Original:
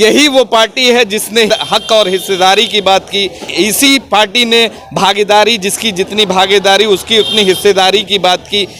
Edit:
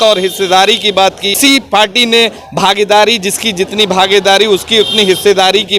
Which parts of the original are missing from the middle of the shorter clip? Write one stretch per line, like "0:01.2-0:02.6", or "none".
0:03.2-0:03.7